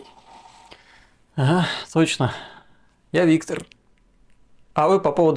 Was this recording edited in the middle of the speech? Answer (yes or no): yes